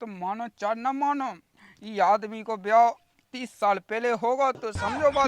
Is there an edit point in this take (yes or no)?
no